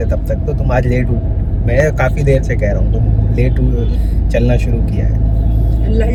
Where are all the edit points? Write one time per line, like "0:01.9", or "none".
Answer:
none